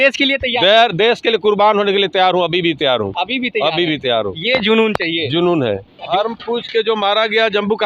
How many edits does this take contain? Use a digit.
1